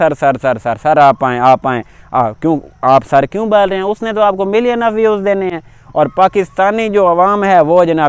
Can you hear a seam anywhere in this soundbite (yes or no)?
no